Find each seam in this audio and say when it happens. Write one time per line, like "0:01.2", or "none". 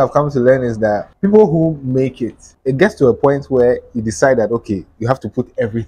0:01.1